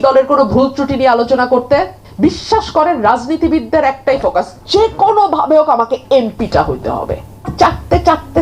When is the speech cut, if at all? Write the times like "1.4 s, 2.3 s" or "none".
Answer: 2.0 s, 7.5 s